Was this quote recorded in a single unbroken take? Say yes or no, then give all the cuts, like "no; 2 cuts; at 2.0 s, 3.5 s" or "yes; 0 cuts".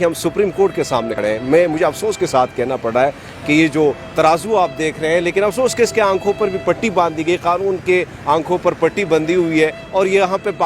no; 1 cut; at 1.1 s